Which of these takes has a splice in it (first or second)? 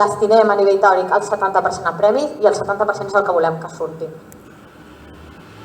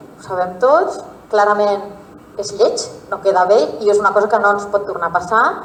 first